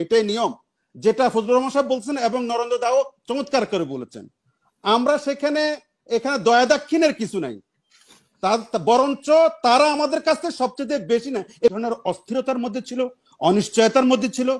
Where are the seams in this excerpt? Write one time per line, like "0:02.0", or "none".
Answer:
0:11.7